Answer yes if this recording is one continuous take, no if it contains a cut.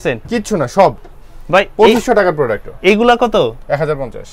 yes